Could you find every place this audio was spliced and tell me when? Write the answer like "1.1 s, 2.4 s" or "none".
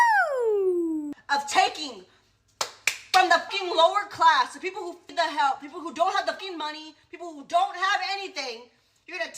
1.1 s